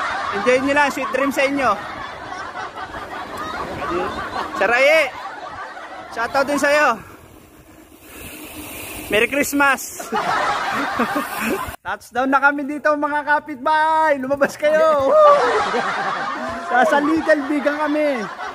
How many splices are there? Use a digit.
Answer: 1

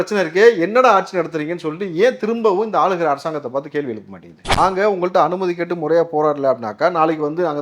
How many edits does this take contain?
1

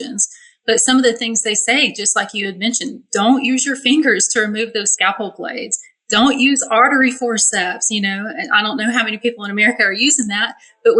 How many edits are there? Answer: 0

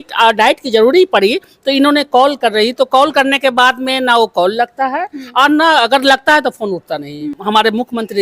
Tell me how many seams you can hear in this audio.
1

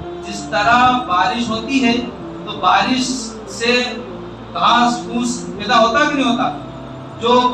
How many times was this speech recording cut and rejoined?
0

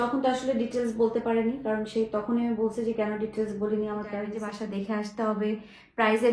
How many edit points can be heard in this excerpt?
1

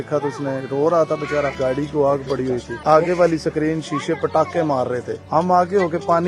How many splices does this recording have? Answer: 3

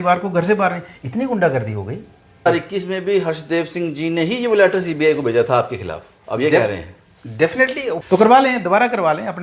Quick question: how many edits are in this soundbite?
2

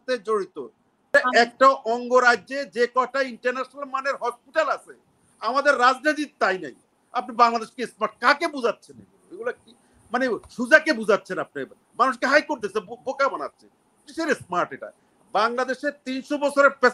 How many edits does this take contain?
1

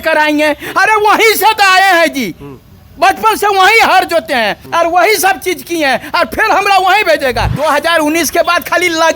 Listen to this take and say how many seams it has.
2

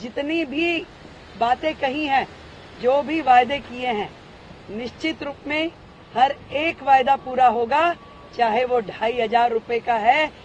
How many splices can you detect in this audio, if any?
0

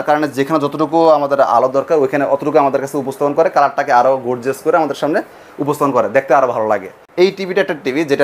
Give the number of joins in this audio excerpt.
1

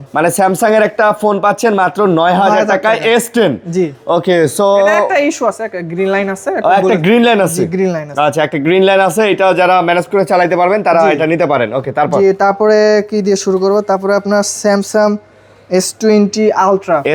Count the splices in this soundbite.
0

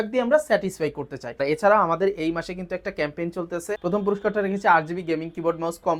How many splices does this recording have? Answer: 2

